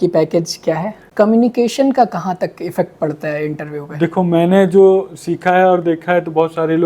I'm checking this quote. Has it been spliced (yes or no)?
yes